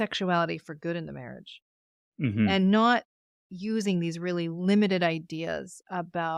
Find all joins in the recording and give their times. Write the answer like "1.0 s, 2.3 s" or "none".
none